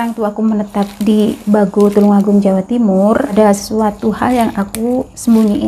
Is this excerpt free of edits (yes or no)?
no